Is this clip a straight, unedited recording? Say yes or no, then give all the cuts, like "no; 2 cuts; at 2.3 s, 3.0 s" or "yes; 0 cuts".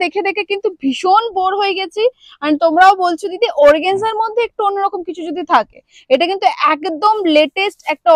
yes; 0 cuts